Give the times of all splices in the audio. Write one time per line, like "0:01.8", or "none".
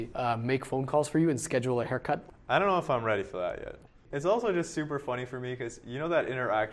0:02.3
0:03.9